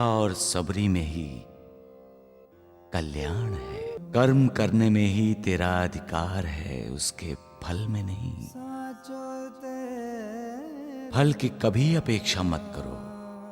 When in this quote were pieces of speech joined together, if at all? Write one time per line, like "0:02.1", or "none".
0:04.0

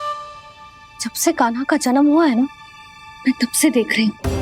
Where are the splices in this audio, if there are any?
0:01.0

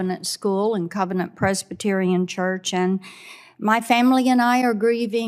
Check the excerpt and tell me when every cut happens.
none

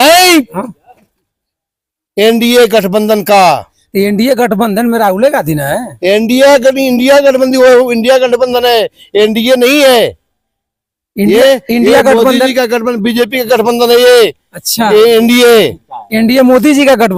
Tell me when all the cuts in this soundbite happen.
none

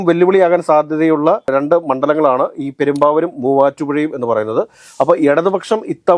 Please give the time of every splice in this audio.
0:04.8

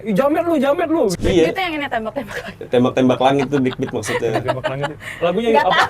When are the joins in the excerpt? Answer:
0:01.1

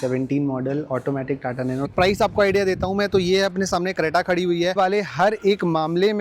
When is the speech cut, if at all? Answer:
0:01.9
0:04.7

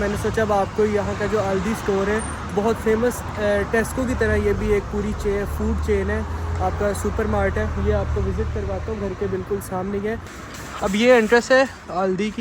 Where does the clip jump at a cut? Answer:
0:10.3

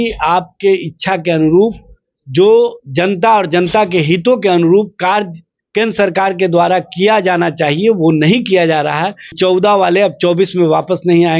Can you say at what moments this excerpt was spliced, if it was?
0:09.2

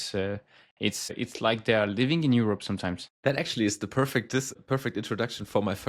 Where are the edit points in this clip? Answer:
0:01.1
0:03.1
0:04.5

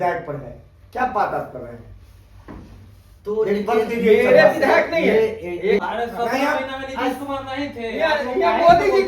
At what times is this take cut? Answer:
0:05.8

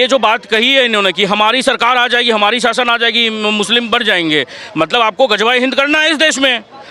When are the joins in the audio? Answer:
none

